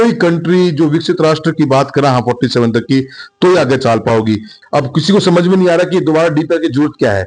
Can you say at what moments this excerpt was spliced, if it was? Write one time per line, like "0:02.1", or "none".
0:04.6